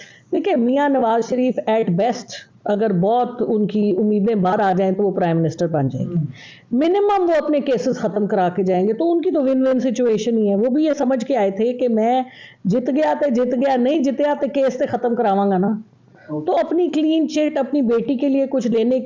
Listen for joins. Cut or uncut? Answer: uncut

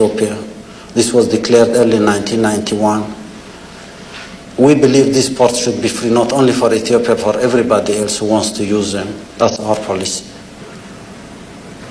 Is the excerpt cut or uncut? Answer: uncut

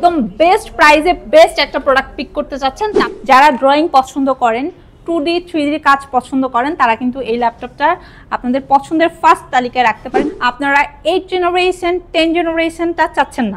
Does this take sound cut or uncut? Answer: cut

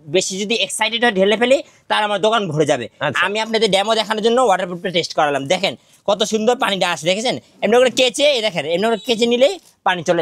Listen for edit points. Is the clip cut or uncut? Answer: uncut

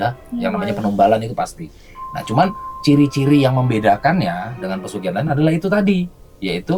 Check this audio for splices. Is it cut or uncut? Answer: uncut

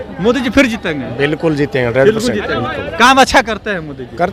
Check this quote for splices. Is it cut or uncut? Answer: uncut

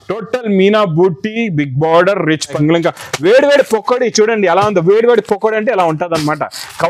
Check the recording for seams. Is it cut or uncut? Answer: cut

